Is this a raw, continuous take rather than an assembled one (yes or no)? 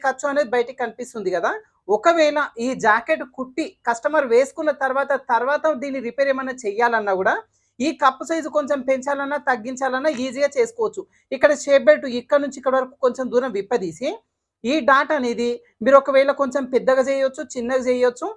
yes